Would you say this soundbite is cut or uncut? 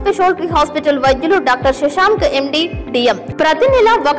cut